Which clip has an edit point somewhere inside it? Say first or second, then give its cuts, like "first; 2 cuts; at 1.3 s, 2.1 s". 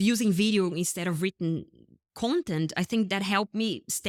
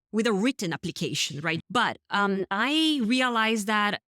second; 1 cut; at 1.6 s